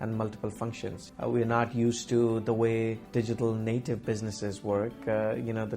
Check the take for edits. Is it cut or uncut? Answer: cut